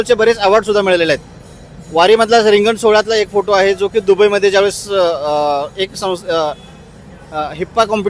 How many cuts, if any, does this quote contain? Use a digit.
0